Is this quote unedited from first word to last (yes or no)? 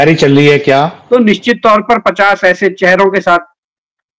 no